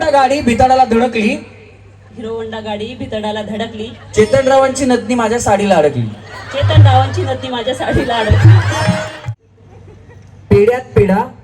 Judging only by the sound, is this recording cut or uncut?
cut